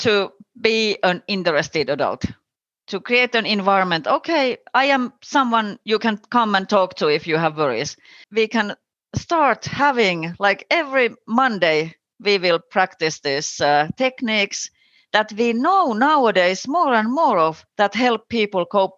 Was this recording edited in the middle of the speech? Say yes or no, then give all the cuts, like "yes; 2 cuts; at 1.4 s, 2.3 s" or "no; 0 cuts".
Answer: yes; 1 cut; at 8.2 s